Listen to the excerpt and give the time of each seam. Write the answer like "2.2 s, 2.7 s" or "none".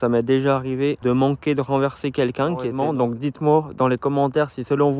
1.0 s, 2.8 s